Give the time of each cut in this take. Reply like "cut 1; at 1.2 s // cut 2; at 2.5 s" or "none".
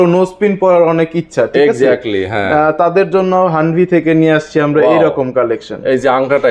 none